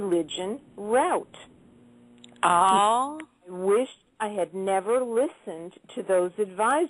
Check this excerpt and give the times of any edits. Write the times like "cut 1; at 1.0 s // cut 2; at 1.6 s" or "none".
cut 1; at 3.9 s